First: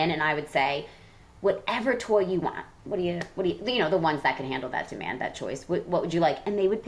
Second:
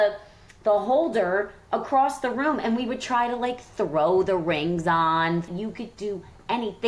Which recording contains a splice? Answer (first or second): second